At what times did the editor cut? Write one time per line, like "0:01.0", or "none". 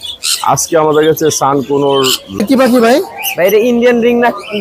0:02.3